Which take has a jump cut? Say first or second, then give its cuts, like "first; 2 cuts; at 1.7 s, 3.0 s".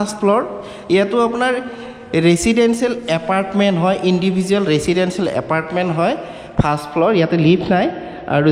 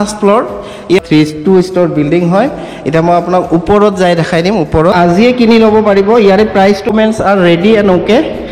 second; 3 cuts; at 1.0 s, 4.9 s, 6.9 s